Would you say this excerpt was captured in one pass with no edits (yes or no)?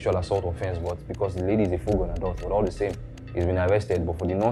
yes